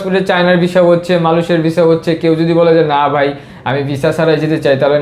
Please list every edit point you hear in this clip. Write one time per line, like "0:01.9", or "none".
none